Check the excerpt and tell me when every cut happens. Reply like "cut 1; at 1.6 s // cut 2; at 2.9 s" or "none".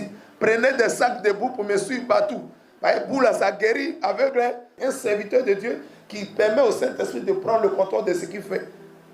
cut 1; at 4.7 s